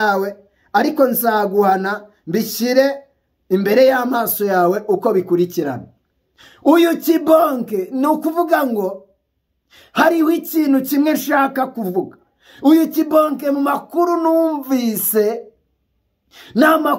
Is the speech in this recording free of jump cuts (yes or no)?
yes